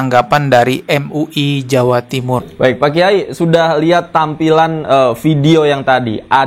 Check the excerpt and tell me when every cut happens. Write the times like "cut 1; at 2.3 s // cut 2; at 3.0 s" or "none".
cut 1; at 2.5 s